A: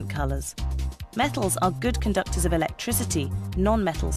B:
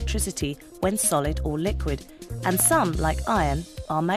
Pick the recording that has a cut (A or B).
B